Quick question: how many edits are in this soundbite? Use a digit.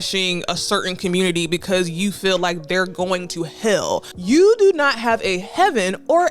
1